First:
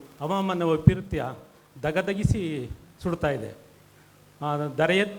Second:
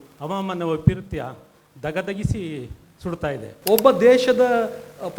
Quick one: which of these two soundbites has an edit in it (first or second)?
second